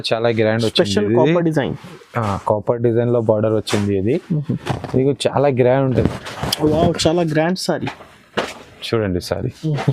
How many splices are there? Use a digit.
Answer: 1